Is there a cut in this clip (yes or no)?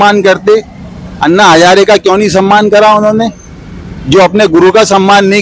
no